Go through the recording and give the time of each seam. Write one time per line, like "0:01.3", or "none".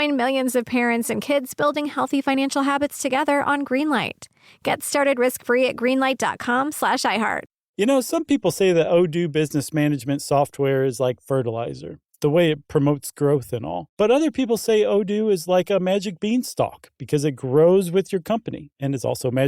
0:07.6

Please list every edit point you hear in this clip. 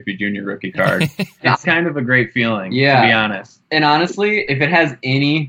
none

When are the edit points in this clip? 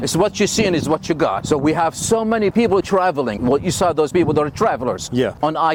none

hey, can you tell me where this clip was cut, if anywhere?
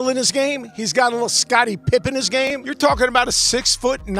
0:02.6

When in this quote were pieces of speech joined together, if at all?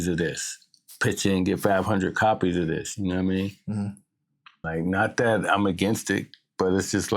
0:04.5

